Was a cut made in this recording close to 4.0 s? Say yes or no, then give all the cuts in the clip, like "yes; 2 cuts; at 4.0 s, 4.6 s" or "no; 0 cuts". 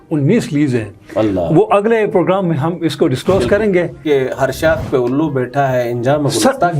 yes; 1 cut; at 4.0 s